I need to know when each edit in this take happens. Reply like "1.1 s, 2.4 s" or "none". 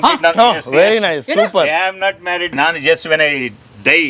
2.5 s